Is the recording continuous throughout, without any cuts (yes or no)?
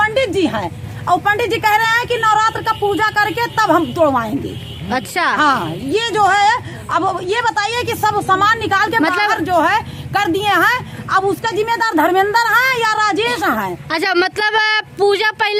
yes